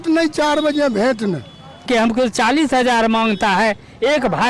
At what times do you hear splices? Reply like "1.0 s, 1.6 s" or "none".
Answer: 1.8 s